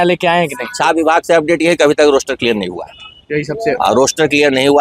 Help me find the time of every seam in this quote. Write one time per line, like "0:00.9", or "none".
none